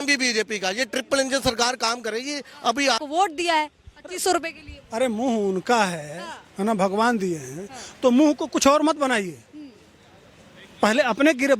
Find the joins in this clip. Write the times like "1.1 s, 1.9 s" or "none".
3.0 s